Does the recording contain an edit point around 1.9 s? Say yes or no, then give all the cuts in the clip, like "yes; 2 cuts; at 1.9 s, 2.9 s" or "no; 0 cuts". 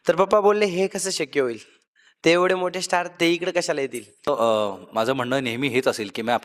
no; 1 cut; at 4.3 s